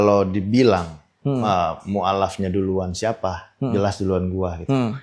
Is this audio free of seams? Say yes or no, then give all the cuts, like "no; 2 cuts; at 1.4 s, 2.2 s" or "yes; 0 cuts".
yes; 0 cuts